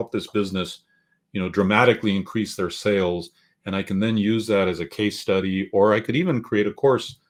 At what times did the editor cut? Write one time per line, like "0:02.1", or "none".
none